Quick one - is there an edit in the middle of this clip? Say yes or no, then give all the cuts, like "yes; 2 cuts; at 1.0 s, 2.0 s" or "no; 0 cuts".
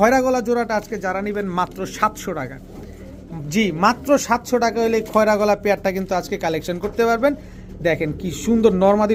no; 0 cuts